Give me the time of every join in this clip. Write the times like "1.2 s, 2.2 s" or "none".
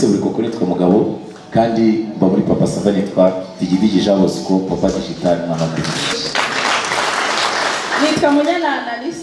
6.1 s